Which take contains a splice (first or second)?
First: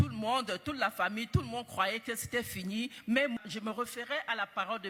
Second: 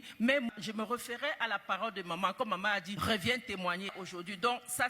second